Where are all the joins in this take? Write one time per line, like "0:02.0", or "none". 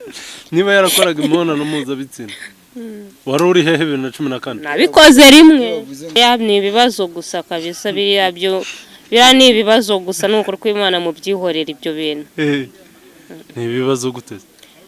0:06.2